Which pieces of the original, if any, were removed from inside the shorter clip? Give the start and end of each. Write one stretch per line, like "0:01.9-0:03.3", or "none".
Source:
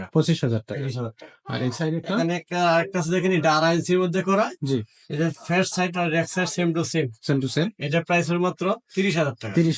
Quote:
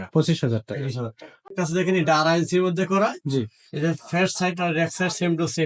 0:01.5-0:02.9